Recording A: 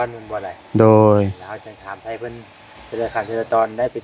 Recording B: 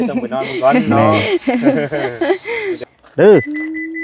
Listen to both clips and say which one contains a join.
B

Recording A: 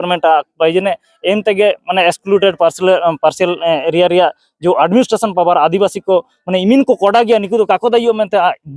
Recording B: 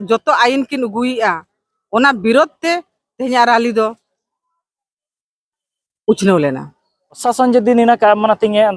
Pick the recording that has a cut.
B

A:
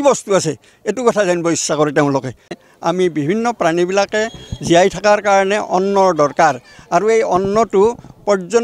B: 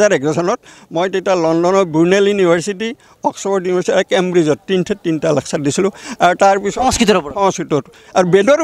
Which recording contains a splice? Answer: A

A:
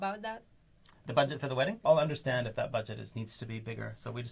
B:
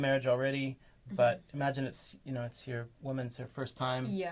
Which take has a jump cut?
A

